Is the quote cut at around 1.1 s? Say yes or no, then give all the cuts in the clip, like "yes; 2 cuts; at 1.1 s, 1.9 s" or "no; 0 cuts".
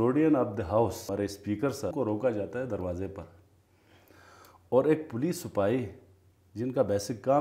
yes; 2 cuts; at 1.1 s, 1.9 s